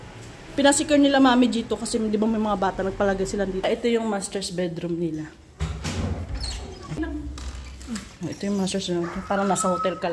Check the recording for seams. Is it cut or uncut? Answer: cut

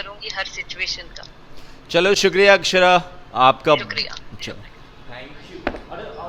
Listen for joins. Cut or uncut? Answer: uncut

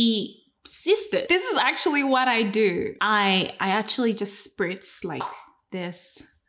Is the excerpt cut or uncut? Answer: cut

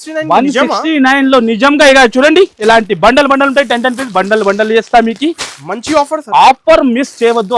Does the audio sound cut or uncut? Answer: uncut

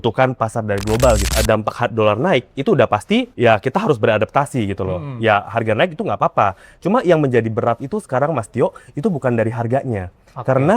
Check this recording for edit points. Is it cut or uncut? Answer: cut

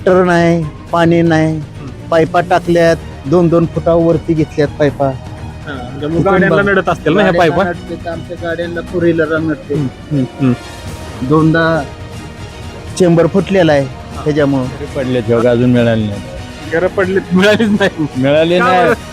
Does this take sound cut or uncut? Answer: cut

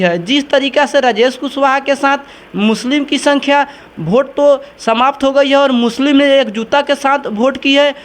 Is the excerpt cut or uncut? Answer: uncut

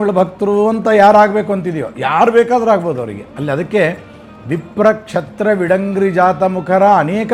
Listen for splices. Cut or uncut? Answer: uncut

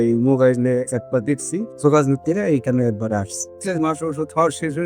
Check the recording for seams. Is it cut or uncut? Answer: cut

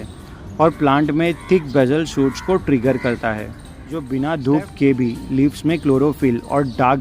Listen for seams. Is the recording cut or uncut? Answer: cut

